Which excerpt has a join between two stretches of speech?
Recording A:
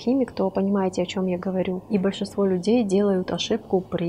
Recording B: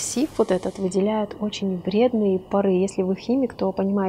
A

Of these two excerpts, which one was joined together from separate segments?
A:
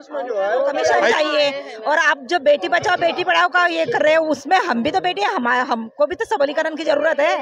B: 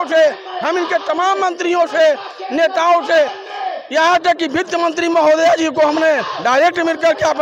A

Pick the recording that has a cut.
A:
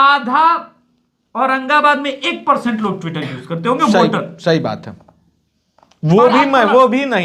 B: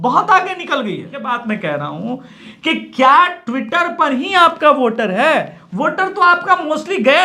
B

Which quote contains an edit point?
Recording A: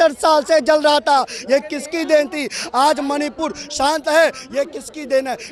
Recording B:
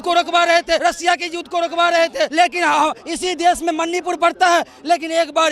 B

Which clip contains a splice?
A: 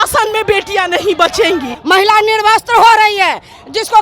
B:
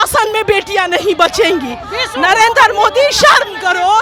A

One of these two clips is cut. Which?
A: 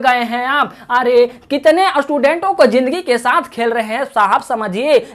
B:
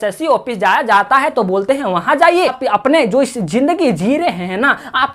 B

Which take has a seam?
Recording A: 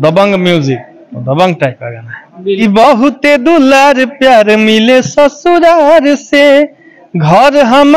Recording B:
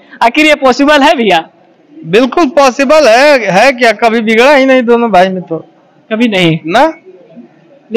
A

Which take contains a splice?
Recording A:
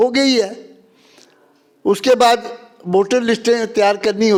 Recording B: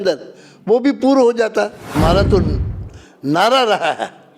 B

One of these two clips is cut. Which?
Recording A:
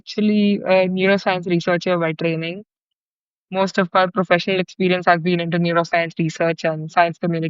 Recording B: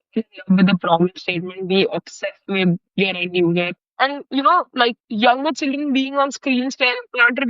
B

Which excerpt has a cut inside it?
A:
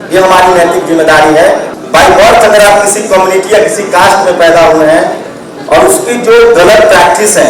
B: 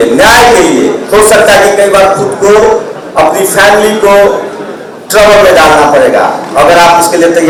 A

